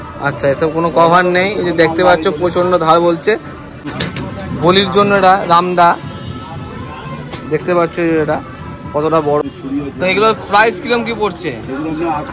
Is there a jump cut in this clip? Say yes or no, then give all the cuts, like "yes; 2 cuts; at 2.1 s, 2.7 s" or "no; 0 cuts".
yes; 2 cuts; at 4.0 s, 9.4 s